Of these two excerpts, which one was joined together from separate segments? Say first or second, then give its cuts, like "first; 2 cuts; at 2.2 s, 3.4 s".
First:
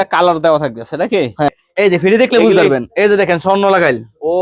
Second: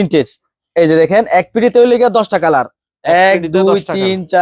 first; 1 cut; at 1.5 s